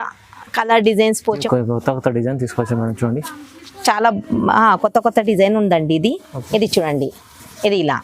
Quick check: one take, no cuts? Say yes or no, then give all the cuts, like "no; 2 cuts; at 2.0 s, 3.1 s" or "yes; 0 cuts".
no; 1 cut; at 1.4 s